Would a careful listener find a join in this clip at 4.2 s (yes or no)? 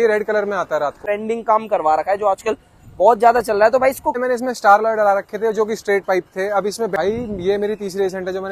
yes